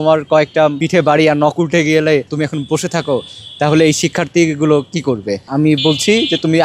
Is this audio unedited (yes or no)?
no